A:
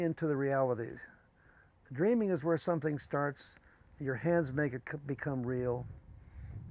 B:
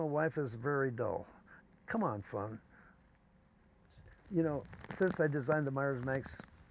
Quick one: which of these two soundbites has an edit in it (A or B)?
B